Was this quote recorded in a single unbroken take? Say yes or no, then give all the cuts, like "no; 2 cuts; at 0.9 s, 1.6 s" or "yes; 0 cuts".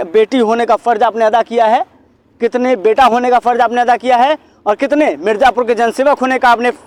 yes; 0 cuts